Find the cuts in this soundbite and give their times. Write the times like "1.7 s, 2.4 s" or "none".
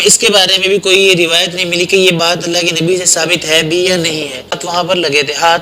4.6 s